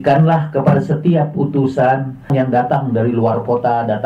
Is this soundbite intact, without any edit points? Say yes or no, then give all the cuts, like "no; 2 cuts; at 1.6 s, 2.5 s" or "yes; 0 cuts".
no; 1 cut; at 2.3 s